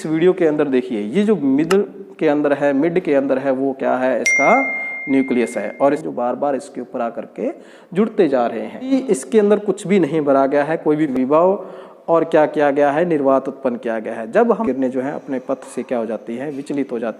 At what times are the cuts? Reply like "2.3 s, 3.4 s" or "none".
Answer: 6.0 s, 8.9 s, 11.1 s, 14.6 s

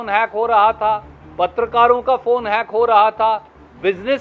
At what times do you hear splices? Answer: none

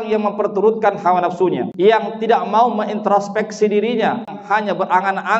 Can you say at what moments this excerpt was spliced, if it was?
1.7 s, 4.4 s

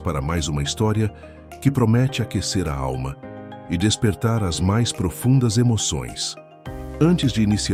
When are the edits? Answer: none

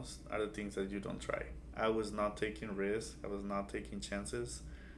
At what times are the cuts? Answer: 1.6 s

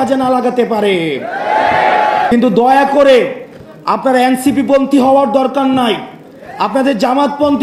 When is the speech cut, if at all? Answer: 2.3 s

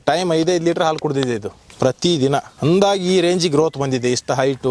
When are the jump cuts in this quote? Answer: 1.6 s, 2.5 s

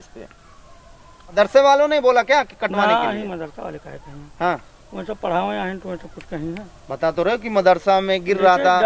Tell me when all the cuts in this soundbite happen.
1.3 s

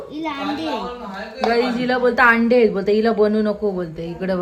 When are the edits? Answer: none

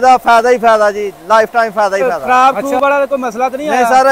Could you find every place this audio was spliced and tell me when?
2.0 s

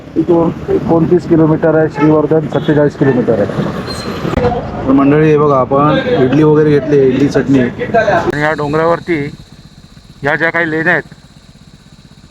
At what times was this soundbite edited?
4.3 s, 8.3 s

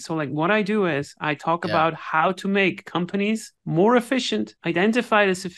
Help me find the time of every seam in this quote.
3.5 s, 4.6 s

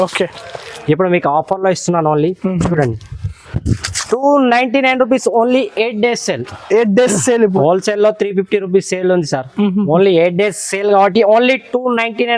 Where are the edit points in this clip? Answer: 7.5 s

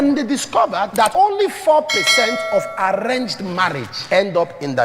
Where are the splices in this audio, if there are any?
1.0 s, 3.9 s

